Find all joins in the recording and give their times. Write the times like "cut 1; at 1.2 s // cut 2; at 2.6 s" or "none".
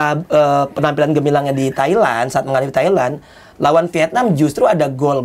none

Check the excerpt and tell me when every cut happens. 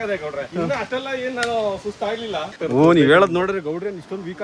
cut 1; at 2.5 s

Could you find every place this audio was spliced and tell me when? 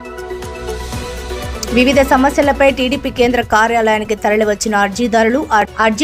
cut 1; at 1.4 s

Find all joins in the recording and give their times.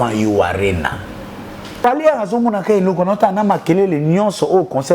cut 1; at 1.7 s

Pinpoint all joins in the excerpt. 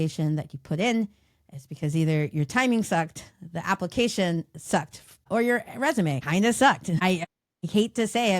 cut 1; at 5.2 s // cut 2; at 6.2 s // cut 3; at 7.3 s

